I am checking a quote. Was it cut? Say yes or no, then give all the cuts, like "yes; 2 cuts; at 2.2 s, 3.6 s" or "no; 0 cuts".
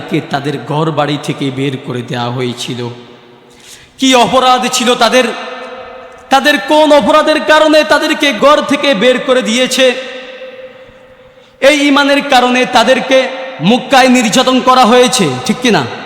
yes; 1 cut; at 8.3 s